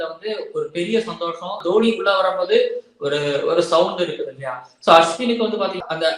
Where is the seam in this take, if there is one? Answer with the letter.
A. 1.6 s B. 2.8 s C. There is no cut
A